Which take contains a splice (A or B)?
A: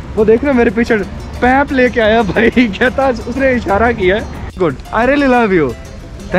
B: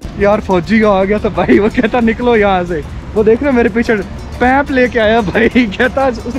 A